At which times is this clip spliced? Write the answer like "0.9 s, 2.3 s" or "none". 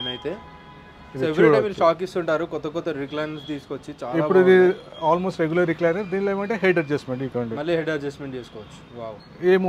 none